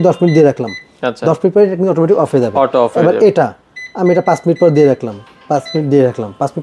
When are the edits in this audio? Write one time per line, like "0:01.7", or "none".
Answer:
none